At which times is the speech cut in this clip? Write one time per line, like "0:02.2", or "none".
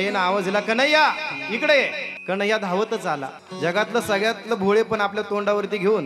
0:02.1
0:03.4